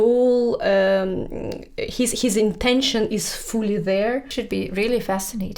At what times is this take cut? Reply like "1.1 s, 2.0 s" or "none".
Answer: 4.3 s

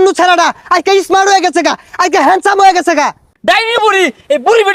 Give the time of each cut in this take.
3.3 s

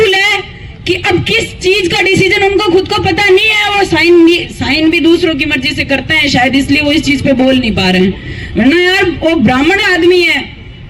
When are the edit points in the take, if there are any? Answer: none

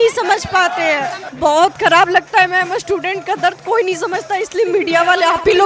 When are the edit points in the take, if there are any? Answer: 1.2 s

